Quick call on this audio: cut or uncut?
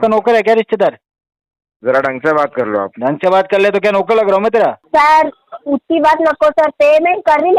cut